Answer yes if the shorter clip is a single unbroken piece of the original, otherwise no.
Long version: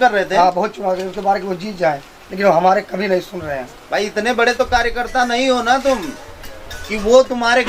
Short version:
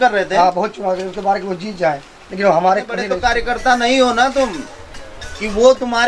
no